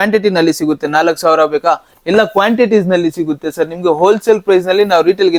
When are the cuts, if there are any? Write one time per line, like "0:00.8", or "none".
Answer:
none